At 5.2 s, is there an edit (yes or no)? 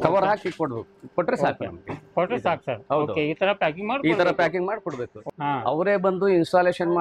yes